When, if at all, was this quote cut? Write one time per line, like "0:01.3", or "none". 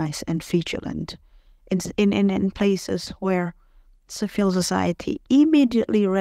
none